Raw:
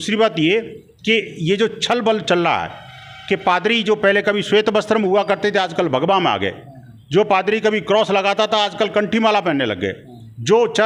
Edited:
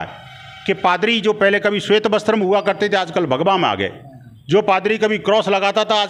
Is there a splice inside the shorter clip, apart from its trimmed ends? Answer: no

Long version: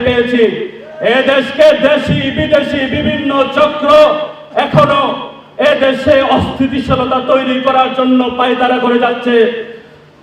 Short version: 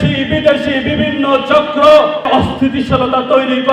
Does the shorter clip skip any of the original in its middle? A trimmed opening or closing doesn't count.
yes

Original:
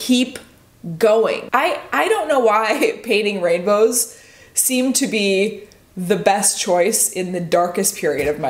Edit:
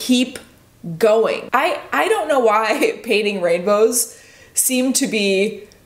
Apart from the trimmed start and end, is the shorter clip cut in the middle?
no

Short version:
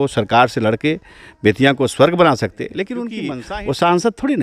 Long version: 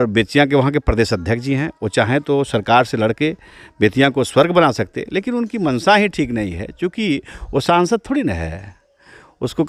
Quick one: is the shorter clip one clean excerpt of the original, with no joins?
no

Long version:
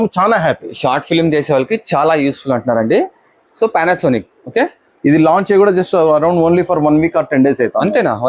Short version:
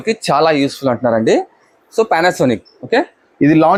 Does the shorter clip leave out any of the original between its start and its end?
no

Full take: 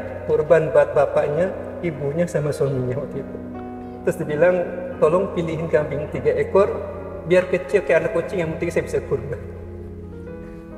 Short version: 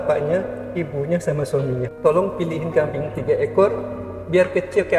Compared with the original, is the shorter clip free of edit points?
no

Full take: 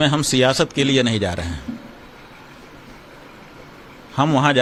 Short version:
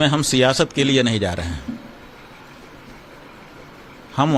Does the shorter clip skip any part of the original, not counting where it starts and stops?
no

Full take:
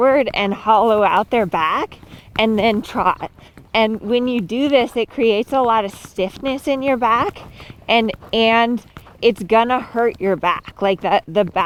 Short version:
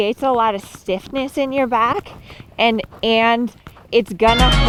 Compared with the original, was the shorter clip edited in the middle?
no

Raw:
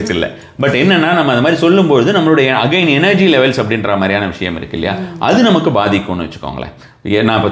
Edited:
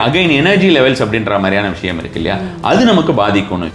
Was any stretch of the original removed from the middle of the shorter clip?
no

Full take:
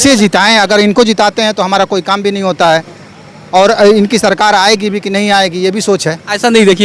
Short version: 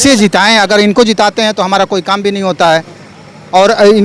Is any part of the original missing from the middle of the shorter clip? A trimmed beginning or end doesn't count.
no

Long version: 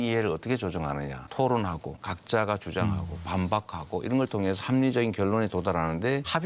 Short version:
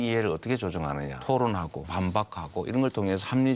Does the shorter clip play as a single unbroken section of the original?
no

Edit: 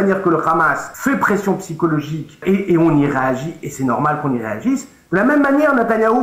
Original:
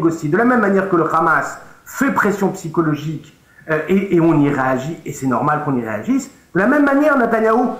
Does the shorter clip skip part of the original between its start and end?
yes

